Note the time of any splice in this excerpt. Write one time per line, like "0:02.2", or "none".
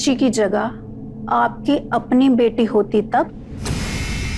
none